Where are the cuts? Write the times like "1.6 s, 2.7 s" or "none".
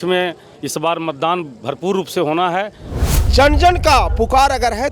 2.9 s